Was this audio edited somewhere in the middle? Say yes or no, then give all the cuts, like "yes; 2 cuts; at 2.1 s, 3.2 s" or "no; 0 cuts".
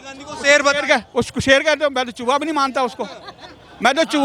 no; 0 cuts